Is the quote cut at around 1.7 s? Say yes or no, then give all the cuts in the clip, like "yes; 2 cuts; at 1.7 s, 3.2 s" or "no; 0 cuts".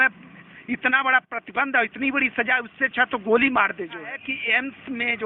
no; 1 cut; at 4.1 s